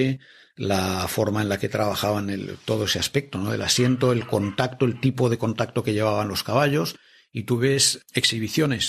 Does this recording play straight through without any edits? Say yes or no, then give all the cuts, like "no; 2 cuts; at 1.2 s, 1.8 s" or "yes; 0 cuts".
no; 1 cut; at 7.9 s